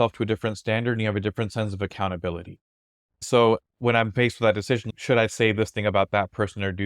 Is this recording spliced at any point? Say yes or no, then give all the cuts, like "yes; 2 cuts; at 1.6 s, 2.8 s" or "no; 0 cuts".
yes; 2 cuts; at 3.2 s, 4.9 s